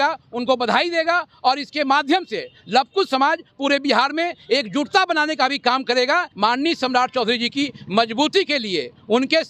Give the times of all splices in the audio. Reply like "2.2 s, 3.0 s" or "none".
6.3 s